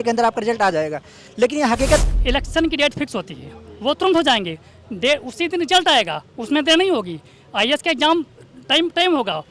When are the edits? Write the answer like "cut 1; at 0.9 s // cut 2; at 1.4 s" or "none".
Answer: cut 1; at 2.0 s

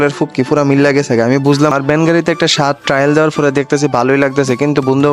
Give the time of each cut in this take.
cut 1; at 1.7 s

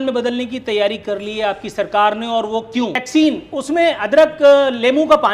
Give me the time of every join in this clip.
cut 1; at 3.0 s

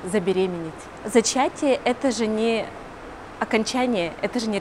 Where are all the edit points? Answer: none

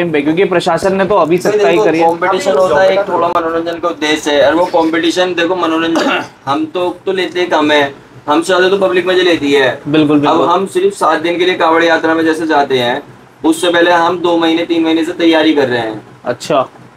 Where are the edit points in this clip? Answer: none

